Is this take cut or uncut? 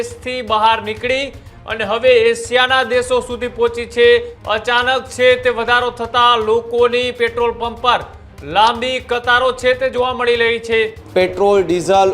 cut